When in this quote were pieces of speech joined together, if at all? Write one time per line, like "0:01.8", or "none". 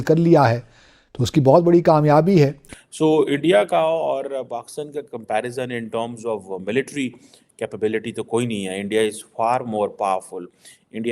0:02.9